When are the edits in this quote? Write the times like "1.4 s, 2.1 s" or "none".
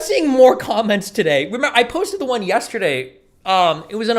none